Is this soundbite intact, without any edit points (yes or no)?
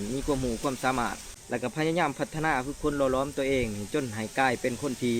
no